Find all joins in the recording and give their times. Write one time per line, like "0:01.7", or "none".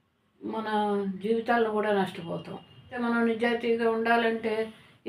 0:03.0